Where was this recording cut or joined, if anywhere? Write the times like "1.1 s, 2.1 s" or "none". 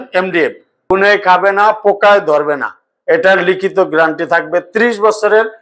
0.9 s